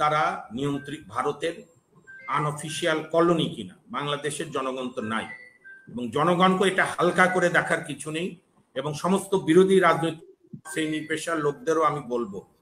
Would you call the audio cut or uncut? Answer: uncut